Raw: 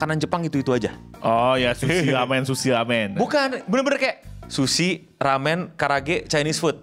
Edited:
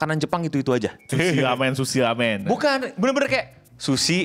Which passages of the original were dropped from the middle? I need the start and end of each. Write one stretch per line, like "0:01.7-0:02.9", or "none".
0:01.1-0:01.8